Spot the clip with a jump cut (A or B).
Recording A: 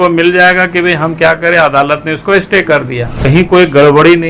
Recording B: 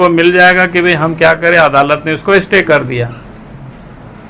A